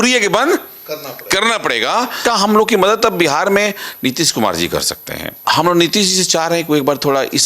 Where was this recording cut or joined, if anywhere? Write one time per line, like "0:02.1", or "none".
0:02.2
0:05.3